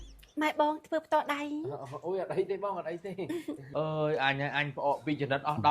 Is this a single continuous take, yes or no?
no